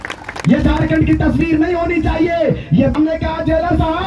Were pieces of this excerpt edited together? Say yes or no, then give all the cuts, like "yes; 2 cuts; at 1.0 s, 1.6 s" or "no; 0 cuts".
yes; 1 cut; at 3.0 s